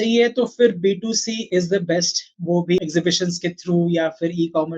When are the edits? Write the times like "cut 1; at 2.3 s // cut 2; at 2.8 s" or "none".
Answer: cut 1; at 1.4 s // cut 2; at 2.8 s

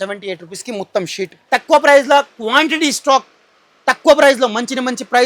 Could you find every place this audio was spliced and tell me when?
cut 1; at 1.3 s

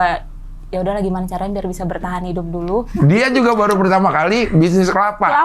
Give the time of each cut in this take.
cut 1; at 2.9 s

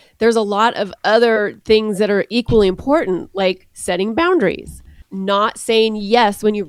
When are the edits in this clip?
none

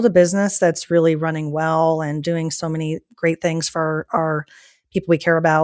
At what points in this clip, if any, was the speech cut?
none

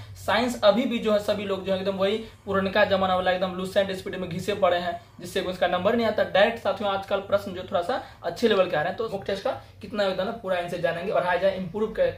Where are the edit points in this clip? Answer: cut 1; at 9.1 s // cut 2; at 11.1 s

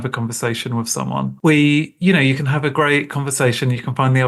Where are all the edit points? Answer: cut 1; at 1.3 s

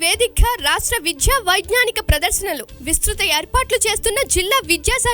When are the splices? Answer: none

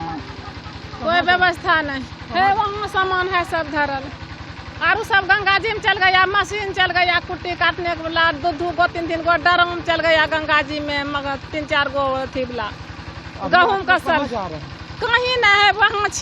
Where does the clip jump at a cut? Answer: none

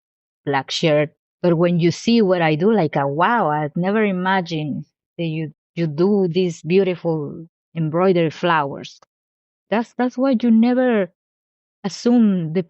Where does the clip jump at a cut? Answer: cut 1; at 1.2 s

